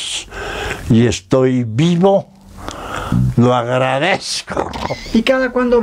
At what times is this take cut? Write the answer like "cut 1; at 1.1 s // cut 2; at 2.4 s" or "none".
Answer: cut 1; at 4.9 s